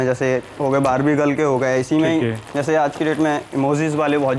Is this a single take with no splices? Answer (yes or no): yes